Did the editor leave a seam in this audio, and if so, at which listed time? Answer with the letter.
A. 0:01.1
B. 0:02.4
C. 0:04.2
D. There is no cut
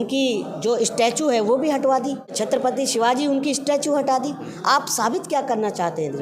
B